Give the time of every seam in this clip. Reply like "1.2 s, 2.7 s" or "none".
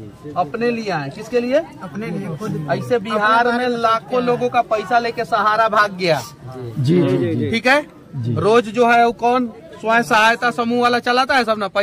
none